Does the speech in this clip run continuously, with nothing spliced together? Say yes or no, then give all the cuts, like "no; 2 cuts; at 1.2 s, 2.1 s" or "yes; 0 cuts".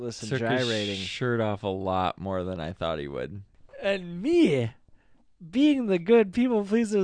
no; 1 cut; at 3.5 s